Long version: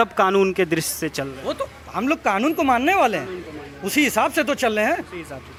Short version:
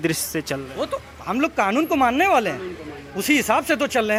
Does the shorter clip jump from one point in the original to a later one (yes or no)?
no